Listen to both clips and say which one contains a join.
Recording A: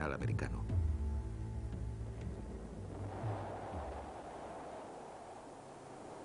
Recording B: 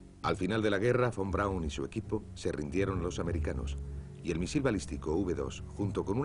A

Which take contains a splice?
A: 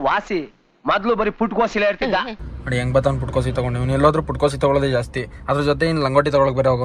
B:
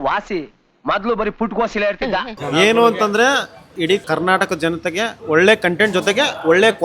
B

